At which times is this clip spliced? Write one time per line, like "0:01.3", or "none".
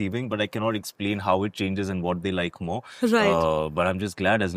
none